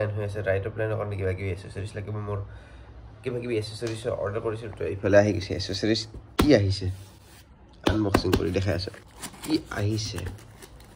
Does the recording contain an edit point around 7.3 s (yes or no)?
no